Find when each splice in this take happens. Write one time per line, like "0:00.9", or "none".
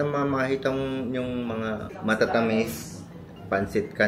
none